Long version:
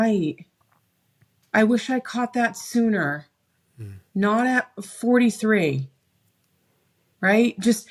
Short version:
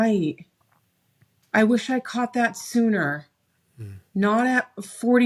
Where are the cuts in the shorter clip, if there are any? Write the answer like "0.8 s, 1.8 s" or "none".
none